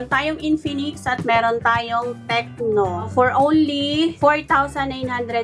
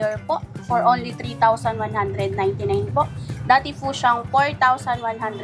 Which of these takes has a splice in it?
first; 2 cuts; at 3.1 s, 4.2 s

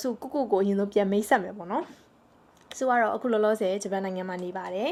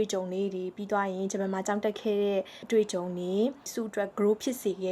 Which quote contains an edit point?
second; 2 cuts; at 2.6 s, 3.7 s

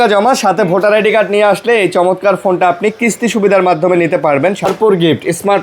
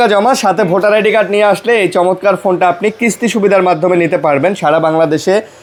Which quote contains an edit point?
first; 1 cut; at 4.6 s

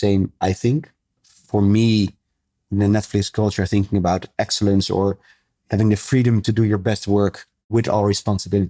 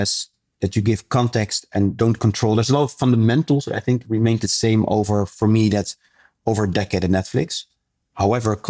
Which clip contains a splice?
first; 1 cut; at 7.5 s

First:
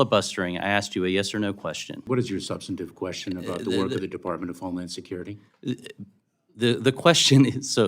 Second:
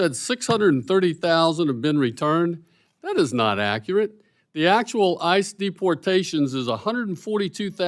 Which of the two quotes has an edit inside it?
first; 1 cut; at 2.0 s

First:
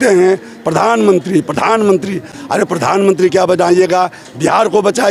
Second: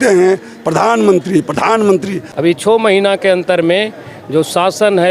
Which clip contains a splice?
second; 1 cut; at 2.2 s

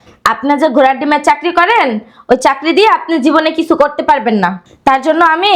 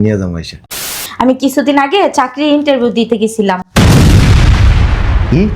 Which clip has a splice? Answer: second; 1 cut; at 1.0 s

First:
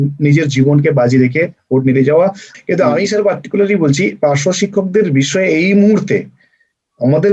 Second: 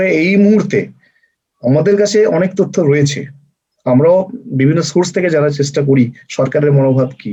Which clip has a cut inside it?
first; 1 cut; at 2.5 s

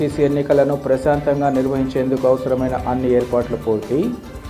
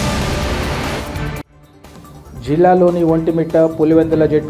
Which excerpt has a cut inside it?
second; 1 cut; at 0.9 s

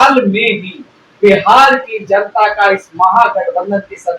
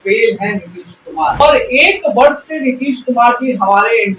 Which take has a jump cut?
second; 1 cut; at 1.4 s

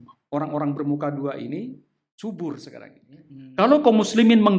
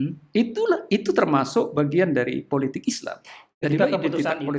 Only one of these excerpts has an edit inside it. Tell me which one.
first; 1 cut; at 3.4 s

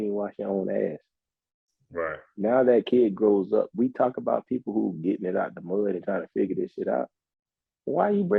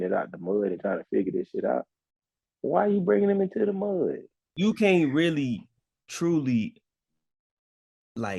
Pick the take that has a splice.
second; 1 cut; at 4.5 s

